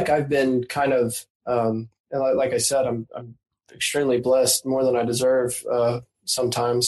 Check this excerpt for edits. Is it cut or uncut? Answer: cut